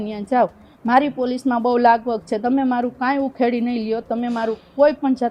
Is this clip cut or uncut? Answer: uncut